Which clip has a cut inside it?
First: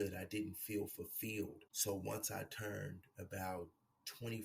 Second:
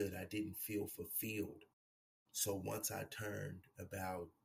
first; 1 cut; at 1.7 s

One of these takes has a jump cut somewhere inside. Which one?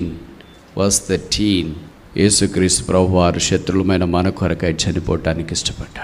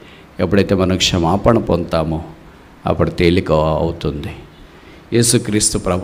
first; 1 cut; at 1.8 s

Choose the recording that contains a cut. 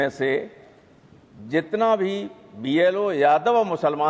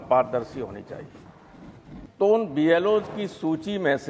second; 1 cut; at 2.1 s

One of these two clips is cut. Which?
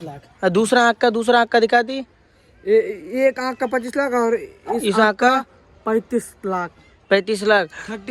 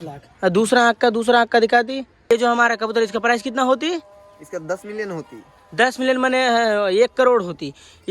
second; 1 cut; at 2.3 s

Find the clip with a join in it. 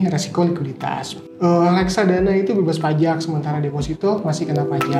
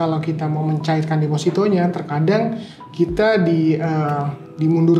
first; 1 cut; at 1.3 s

